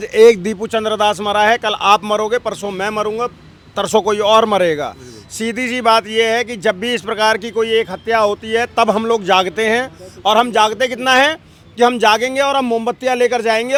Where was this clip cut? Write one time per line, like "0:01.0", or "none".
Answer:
none